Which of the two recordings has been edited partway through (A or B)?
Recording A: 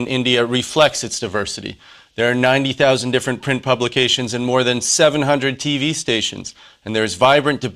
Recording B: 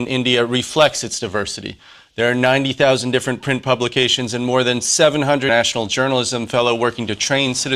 A